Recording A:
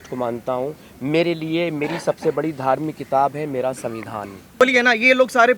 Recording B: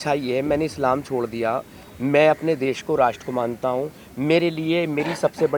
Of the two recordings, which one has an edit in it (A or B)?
A